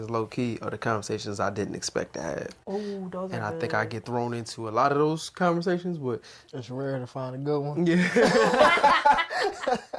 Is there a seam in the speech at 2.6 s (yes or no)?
no